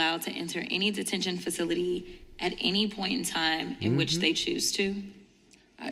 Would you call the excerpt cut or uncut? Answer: uncut